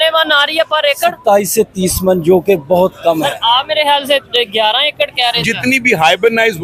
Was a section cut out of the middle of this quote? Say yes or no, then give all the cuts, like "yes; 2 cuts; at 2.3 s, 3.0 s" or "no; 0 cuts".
yes; 1 cut; at 5.4 s